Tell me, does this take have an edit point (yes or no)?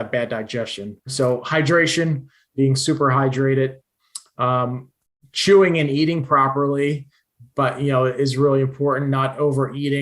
yes